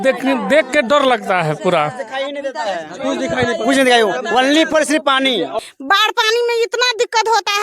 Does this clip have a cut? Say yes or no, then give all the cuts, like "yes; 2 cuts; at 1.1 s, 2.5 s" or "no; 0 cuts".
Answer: yes; 1 cut; at 5.5 s